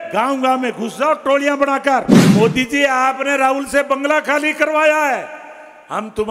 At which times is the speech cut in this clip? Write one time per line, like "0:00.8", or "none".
0:02.2